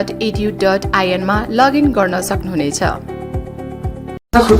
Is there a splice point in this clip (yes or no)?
no